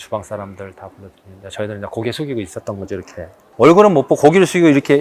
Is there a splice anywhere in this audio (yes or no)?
yes